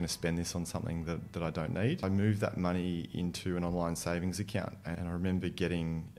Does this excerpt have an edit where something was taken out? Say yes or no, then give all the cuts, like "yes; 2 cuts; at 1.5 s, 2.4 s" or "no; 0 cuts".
yes; 2 cuts; at 2.0 s, 4.8 s